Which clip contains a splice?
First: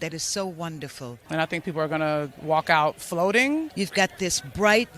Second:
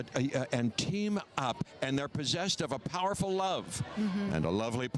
first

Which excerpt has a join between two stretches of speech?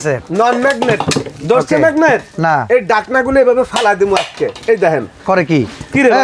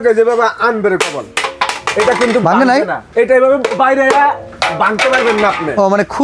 second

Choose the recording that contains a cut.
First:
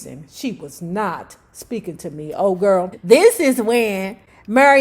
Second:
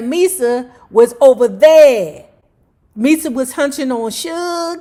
first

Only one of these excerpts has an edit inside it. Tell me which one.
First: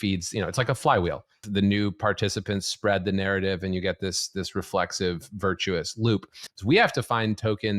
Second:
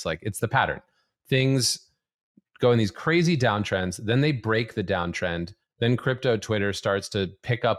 first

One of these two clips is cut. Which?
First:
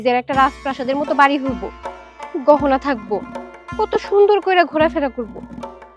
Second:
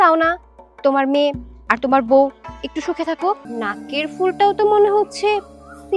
second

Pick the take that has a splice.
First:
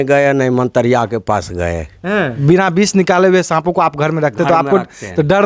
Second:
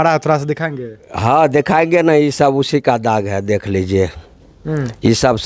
first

